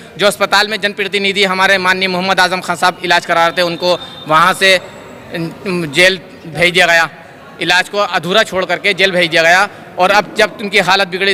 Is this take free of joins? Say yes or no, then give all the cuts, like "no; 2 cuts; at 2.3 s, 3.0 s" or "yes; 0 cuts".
yes; 0 cuts